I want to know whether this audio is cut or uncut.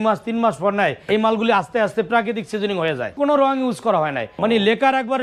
cut